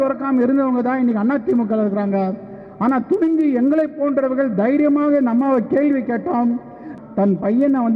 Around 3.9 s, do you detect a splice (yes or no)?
no